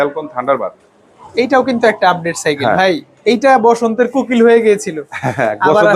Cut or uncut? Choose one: uncut